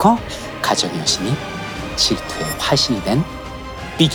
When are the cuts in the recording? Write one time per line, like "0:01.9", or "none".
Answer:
none